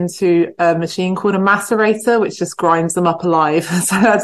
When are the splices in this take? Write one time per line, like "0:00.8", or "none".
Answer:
none

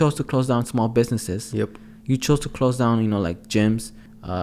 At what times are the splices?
none

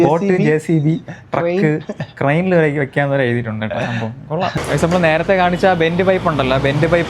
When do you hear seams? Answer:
0:04.6

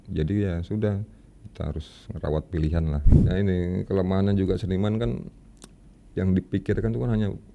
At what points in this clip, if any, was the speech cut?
0:03.1

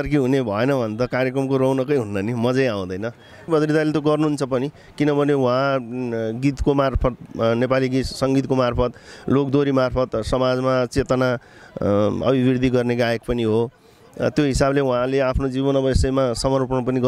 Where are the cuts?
0:03.5

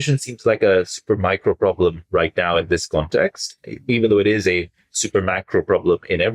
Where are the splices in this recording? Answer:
none

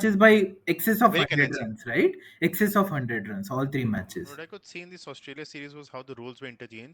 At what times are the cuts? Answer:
0:04.0

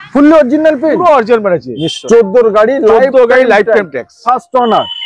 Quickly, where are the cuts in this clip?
0:01.9

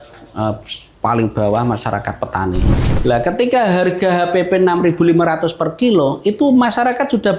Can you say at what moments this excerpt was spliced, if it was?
0:02.9

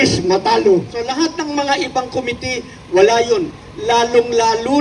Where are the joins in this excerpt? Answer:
0:01.0

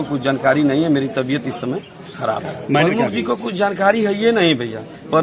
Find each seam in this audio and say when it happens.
0:02.8

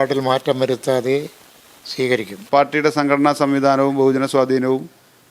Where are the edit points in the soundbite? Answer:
0:02.4

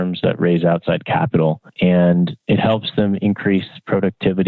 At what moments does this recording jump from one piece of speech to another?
none

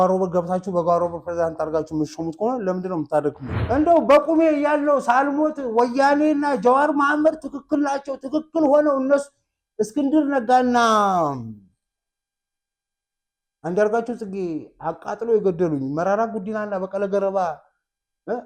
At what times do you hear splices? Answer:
0:03.5

